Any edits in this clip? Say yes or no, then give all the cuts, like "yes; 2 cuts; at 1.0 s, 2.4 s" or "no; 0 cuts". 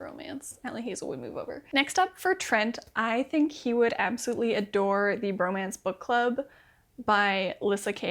no; 0 cuts